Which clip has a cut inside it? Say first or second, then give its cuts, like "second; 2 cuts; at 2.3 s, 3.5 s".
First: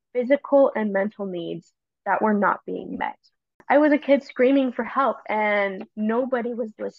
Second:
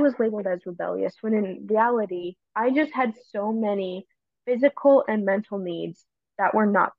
first; 1 cut; at 3.6 s